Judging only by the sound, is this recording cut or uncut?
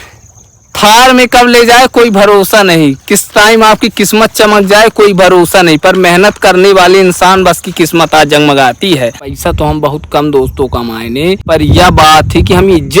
cut